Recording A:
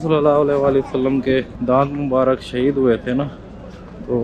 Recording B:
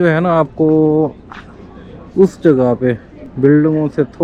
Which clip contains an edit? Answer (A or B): A